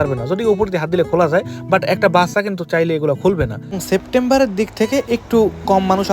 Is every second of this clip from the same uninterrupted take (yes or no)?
no